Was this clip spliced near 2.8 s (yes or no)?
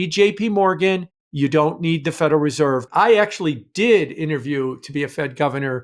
yes